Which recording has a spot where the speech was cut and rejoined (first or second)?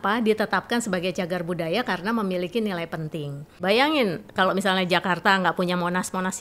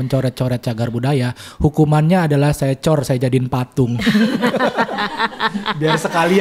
first